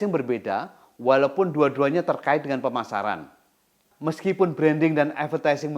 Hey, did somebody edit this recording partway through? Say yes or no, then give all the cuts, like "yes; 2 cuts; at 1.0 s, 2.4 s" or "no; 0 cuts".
yes; 1 cut; at 3.8 s